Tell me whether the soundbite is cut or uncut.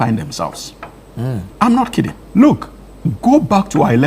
cut